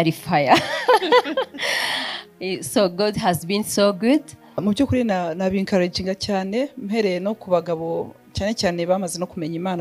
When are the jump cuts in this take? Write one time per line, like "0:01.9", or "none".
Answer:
0:04.6

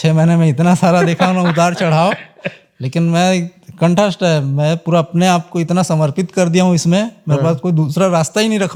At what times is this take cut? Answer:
none

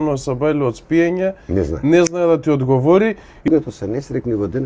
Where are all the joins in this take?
0:03.5

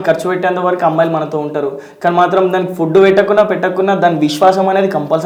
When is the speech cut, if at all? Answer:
none

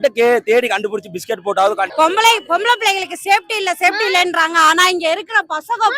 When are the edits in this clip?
0:01.9

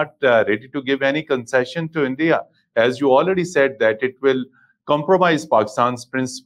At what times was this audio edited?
none

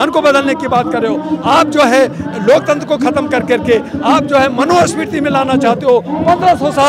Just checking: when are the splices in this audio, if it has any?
none

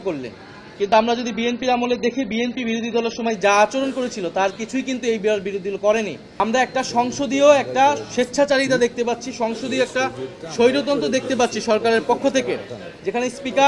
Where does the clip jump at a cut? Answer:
0:06.2

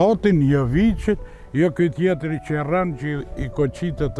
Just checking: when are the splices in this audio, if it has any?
none

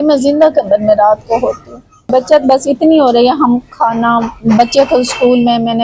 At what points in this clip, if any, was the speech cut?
none

